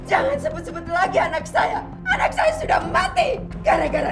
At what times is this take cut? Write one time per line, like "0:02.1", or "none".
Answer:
none